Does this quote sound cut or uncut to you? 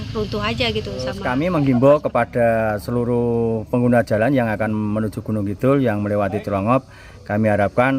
cut